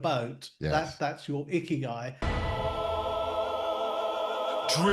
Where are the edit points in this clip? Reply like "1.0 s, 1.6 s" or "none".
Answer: 2.2 s